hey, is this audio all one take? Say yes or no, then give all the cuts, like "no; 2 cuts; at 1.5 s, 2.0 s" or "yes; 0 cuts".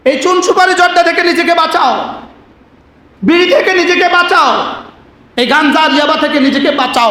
yes; 0 cuts